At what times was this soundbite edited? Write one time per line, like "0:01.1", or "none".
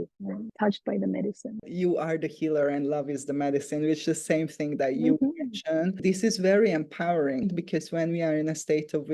0:01.7
0:06.0
0:07.5